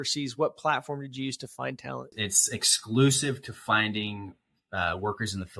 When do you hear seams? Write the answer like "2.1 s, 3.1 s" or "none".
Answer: 2.1 s